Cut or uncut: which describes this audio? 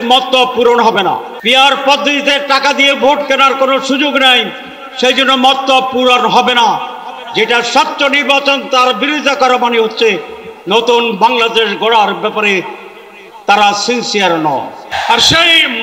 cut